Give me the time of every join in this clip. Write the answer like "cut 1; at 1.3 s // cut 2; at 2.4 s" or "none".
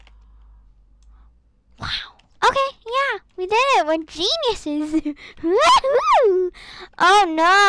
none

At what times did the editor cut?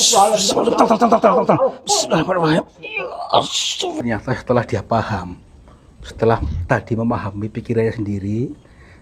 cut 1; at 4.0 s

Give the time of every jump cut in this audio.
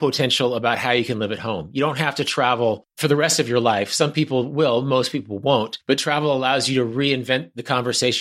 cut 1; at 2.9 s // cut 2; at 5.7 s

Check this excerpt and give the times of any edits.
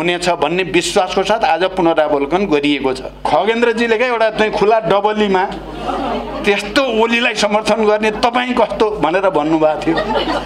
cut 1; at 3.2 s

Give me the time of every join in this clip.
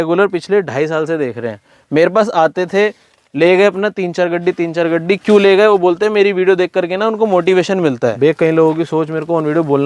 cut 1; at 8.2 s

